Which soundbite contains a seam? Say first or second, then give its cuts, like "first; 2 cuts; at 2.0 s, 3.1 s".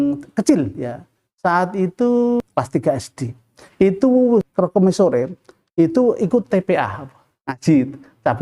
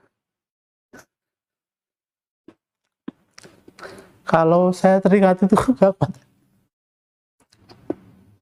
first; 2 cuts; at 2.5 s, 4.4 s